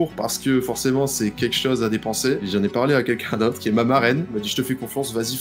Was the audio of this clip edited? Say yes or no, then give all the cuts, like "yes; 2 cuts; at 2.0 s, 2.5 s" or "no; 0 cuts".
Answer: yes; 3 cuts; at 2.5 s, 3.6 s, 4.4 s